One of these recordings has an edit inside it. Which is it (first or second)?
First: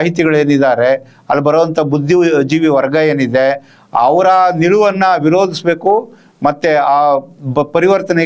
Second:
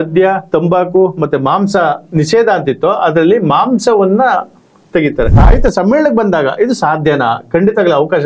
second